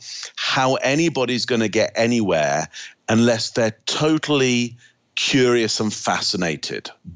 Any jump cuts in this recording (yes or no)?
no